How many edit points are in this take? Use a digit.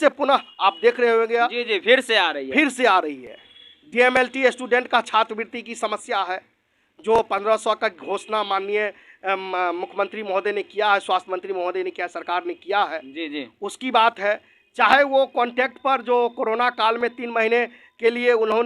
1